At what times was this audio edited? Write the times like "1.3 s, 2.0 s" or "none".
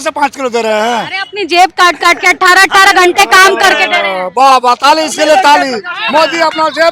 none